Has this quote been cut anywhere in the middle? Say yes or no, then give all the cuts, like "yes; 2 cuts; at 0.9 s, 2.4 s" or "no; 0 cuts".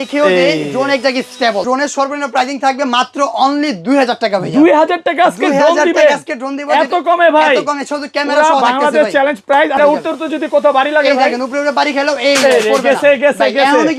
yes; 2 cuts; at 1.6 s, 9.8 s